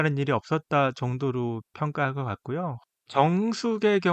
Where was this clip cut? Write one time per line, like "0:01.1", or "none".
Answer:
0:02.8